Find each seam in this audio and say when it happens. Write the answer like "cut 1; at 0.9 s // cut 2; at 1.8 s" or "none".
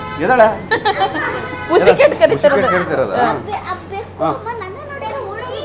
none

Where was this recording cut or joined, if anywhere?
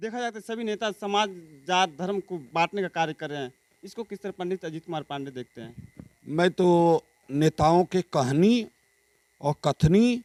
none

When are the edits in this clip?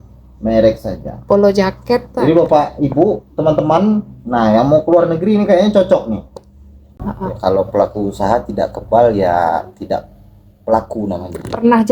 cut 1; at 6.9 s

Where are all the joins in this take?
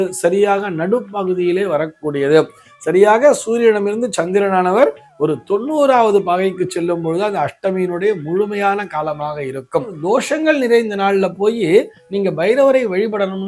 cut 1; at 10.0 s

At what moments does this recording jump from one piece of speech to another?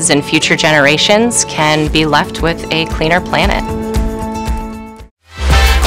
none

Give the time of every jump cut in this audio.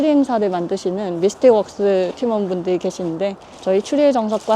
none

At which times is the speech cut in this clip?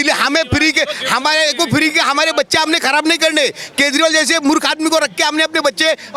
none

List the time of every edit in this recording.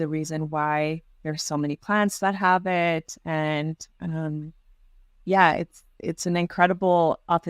none

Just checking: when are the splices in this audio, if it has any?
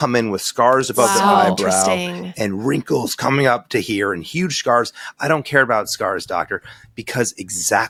none

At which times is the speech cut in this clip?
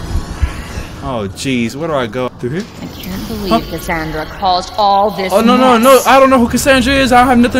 cut 1; at 0.9 s // cut 2; at 2.3 s

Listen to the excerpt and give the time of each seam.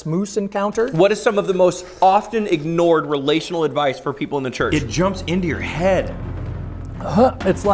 cut 1; at 0.9 s // cut 2; at 4.7 s

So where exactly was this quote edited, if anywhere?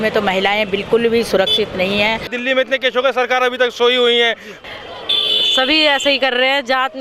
cut 1; at 2.3 s // cut 2; at 4.5 s

